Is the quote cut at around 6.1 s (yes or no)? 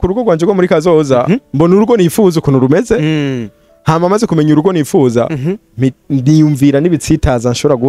no